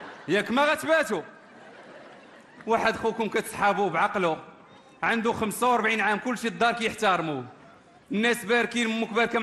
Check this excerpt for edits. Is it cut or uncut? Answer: uncut